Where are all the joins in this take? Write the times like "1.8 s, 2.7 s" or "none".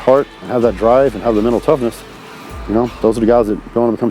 none

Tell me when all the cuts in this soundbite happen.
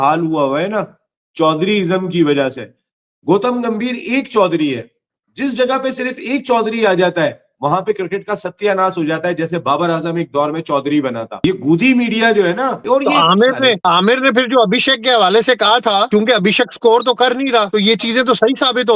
11.4 s, 12.7 s, 13.8 s, 16.1 s, 17.7 s

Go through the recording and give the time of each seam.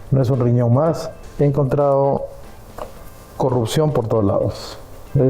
1.2 s

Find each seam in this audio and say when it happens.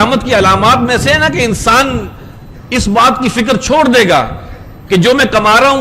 none

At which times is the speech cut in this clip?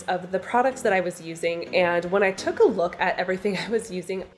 none

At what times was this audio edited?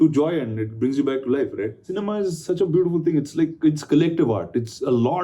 1.8 s

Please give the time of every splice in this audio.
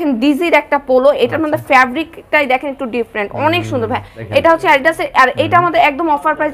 4.2 s

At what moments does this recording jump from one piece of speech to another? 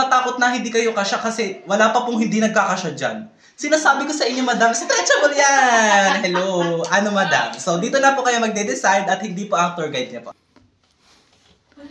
10.8 s

